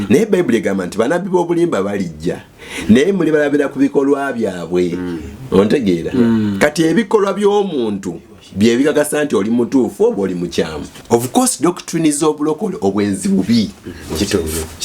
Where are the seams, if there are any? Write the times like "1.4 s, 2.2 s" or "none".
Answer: 10.9 s